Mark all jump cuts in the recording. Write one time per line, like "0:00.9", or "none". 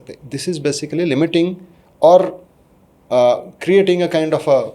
none